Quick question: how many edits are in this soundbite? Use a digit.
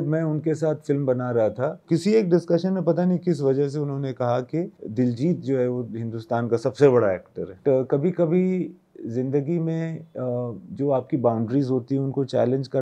2